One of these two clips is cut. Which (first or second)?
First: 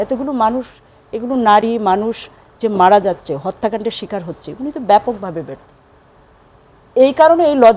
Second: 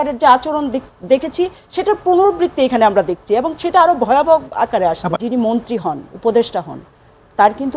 second